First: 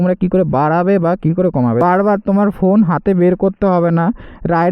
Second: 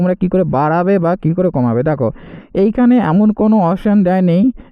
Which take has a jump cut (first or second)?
first